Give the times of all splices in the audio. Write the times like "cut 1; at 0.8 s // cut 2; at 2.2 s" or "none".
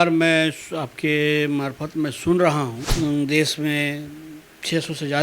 cut 1; at 2.8 s

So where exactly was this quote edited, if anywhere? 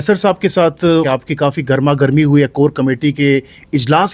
cut 1; at 1.1 s

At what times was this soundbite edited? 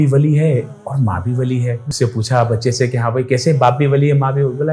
cut 1; at 1.9 s

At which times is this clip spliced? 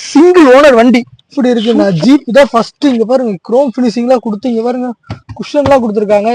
cut 1; at 1.3 s

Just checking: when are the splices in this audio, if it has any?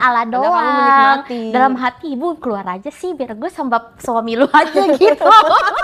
none

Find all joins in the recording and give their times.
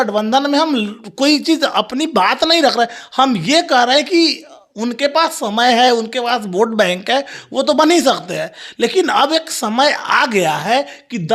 none

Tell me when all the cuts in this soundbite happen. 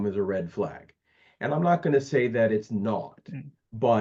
none

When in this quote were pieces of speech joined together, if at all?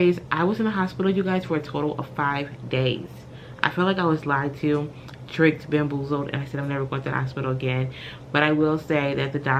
none

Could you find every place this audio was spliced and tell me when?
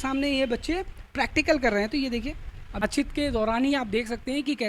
cut 1; at 2.8 s

